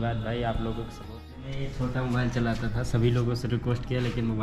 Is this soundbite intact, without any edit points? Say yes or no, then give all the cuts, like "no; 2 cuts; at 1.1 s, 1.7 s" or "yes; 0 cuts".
no; 1 cut; at 1.4 s